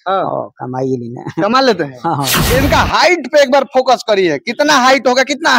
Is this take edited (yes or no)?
yes